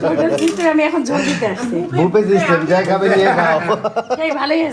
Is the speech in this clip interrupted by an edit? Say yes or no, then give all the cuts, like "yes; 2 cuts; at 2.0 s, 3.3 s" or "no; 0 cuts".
no; 0 cuts